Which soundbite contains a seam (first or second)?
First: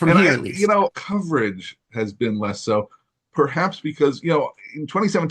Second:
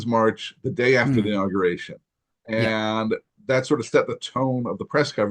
first